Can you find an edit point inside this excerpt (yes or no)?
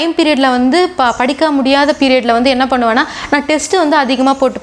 no